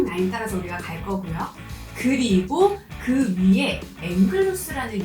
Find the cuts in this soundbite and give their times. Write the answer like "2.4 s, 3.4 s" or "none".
4.0 s